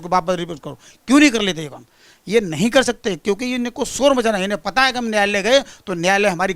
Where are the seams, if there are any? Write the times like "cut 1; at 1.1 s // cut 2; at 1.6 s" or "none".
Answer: none